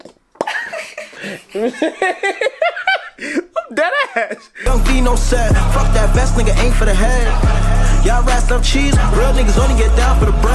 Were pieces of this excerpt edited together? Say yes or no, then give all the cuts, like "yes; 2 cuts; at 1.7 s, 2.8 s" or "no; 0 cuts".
yes; 1 cut; at 4.5 s